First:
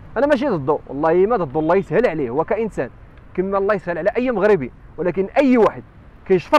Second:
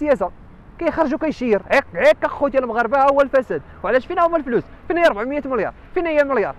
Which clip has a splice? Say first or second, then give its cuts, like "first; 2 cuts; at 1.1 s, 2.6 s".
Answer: second; 1 cut; at 1.6 s